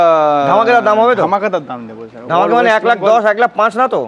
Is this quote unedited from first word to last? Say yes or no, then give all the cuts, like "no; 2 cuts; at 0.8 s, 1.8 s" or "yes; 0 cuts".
yes; 0 cuts